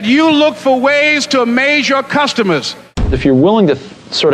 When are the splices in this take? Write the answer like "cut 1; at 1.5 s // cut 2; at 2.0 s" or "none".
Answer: cut 1; at 3.2 s